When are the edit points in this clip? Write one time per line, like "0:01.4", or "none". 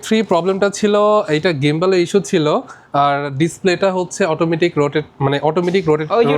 none